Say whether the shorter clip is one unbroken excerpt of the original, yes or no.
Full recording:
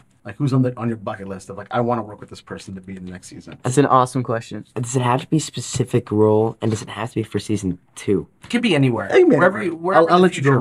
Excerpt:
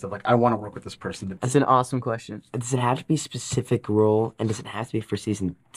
no